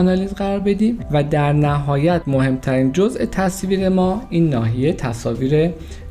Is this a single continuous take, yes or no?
no